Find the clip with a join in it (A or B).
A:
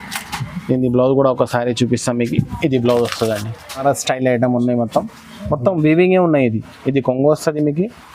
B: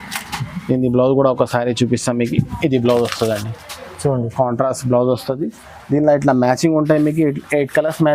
A